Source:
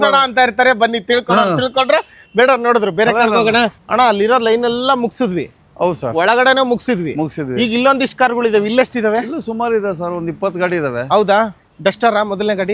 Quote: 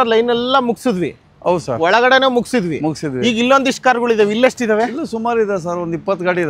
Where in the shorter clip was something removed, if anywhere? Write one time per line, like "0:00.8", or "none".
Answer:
none

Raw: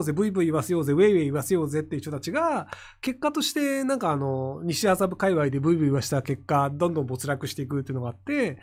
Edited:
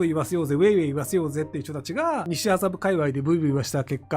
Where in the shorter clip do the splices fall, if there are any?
0:02.3

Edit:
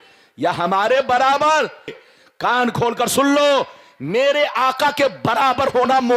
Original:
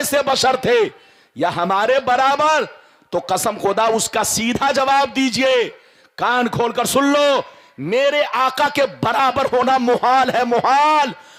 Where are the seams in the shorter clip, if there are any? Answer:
0:02.0

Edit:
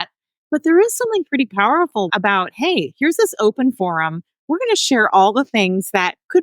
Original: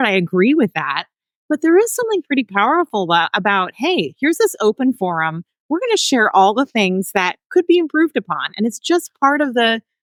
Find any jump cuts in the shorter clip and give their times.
0:02.1

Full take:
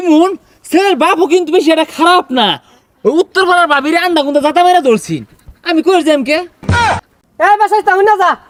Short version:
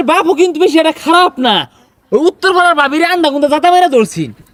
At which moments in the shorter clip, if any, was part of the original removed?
none

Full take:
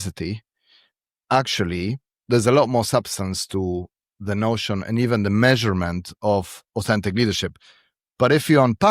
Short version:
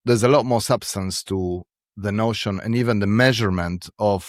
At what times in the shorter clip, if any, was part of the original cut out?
none

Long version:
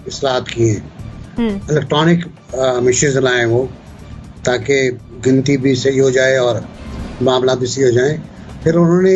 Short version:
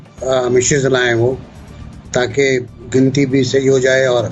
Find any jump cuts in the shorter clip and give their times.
none

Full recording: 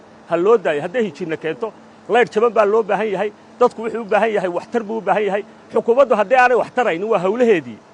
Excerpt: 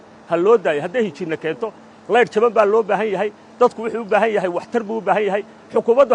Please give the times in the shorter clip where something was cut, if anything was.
none

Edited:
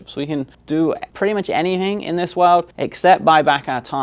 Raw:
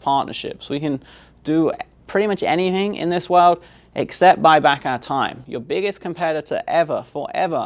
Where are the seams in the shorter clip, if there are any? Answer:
0:00.9
0:02.8

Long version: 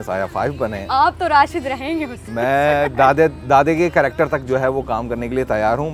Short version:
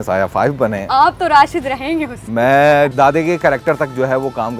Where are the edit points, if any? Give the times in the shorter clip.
0:02.9

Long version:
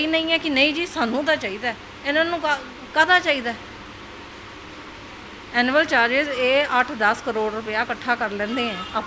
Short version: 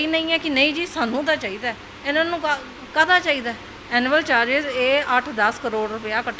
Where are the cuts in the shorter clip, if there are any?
0:03.7

